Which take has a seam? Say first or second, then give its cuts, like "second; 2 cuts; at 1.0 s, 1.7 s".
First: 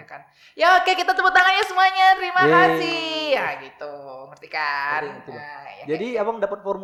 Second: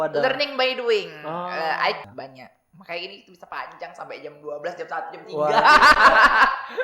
second; 1 cut; at 2.1 s